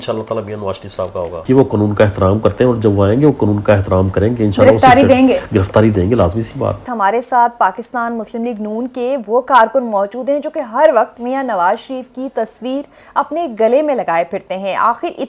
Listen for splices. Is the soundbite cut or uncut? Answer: cut